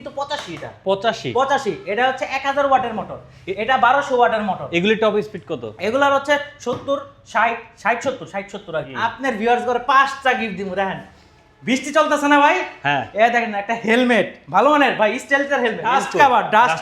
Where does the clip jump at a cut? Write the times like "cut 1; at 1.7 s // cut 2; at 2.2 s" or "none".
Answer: cut 1; at 8.9 s // cut 2; at 15.9 s